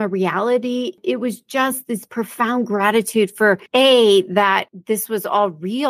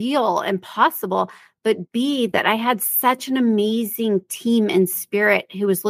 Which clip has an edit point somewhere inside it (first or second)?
first